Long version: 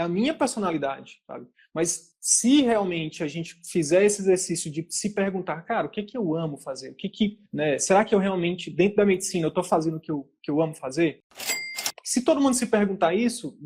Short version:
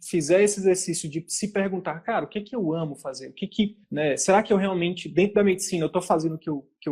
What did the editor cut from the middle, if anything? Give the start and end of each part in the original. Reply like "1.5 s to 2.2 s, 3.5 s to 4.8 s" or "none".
none